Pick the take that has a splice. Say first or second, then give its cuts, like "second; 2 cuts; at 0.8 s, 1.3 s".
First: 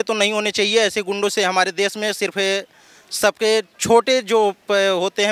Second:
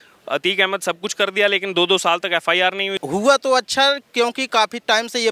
second; 1 cut; at 2.9 s